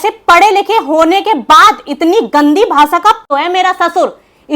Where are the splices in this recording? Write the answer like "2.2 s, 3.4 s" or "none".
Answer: 3.2 s